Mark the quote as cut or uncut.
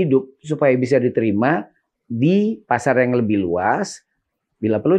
uncut